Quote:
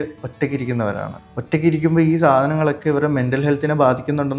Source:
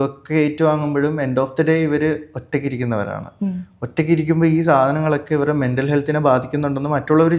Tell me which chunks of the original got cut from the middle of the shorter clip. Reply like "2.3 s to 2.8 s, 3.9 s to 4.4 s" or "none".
3.3 s to 3.6 s